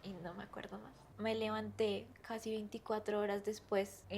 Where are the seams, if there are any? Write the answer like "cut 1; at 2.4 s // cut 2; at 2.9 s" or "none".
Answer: cut 1; at 1.1 s